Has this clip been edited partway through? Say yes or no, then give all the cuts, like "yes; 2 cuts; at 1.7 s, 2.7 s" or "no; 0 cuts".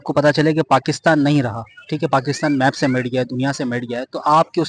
no; 0 cuts